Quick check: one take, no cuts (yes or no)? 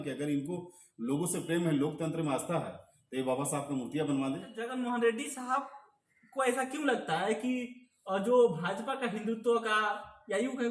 no